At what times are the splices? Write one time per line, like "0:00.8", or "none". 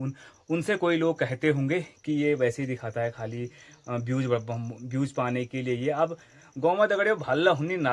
none